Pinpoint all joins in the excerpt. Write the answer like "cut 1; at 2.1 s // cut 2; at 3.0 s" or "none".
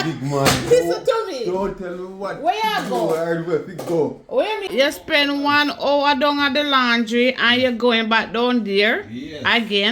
cut 1; at 4.7 s

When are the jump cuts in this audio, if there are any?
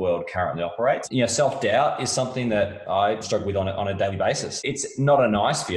cut 1; at 1.0 s // cut 2; at 3.2 s // cut 3; at 4.5 s

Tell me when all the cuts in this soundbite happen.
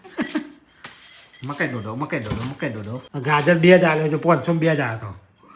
cut 1; at 3.0 s

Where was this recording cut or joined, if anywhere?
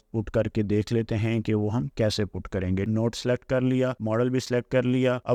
none

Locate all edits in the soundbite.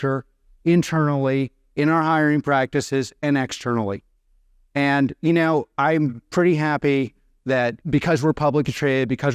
cut 1; at 7.8 s

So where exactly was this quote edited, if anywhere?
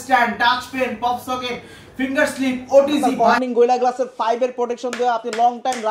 cut 1; at 3.1 s

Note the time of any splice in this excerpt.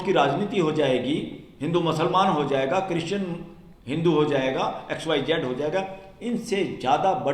none

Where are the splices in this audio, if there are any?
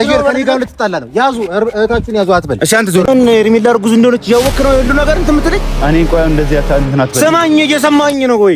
cut 1; at 3.1 s

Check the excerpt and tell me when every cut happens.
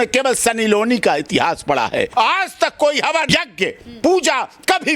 cut 1; at 2.1 s // cut 2; at 3.3 s

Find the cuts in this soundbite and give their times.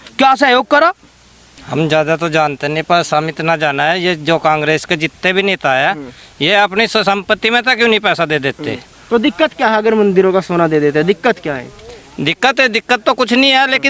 cut 1; at 1.6 s // cut 2; at 8.9 s

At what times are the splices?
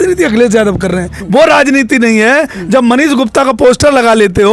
cut 1; at 1.1 s

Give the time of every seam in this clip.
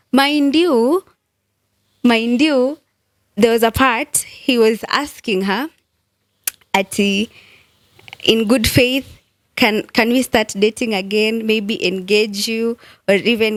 none

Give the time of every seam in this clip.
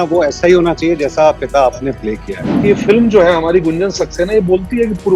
cut 1; at 2.6 s

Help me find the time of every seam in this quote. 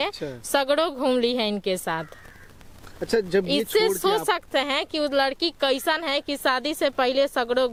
none

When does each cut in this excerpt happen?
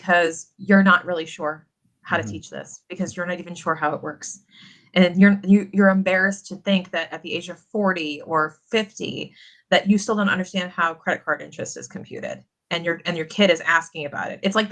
none

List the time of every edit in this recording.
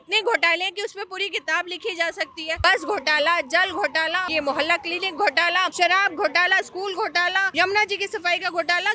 cut 1; at 2.6 s // cut 2; at 4.3 s // cut 3; at 5.7 s // cut 4; at 7.5 s

